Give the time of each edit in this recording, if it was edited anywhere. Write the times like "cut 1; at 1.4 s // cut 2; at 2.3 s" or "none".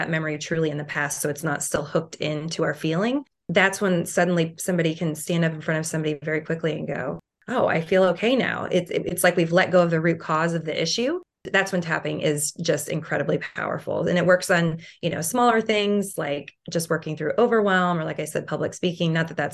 none

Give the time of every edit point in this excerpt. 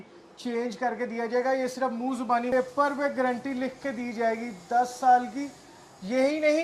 cut 1; at 2.5 s

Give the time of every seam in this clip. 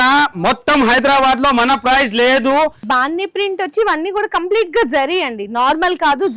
cut 1; at 2.8 s

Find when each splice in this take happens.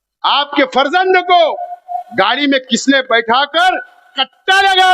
cut 1; at 2.0 s

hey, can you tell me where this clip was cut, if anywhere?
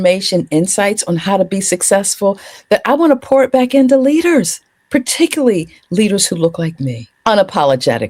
cut 1; at 7.0 s

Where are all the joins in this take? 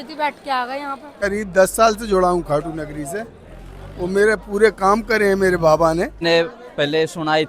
cut 1; at 1.2 s // cut 2; at 6.2 s

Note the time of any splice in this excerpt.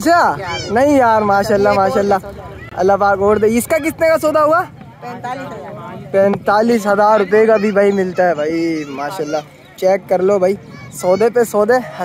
none

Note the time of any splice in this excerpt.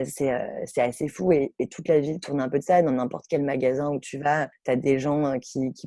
none

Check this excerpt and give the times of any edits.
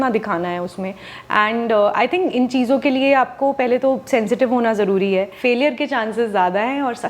cut 1; at 5.3 s

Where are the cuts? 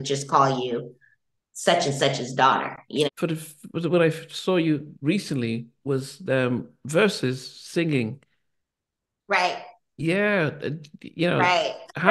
cut 1; at 3.1 s

